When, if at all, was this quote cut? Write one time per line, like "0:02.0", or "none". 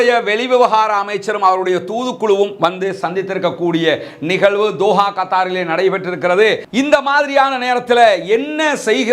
0:06.6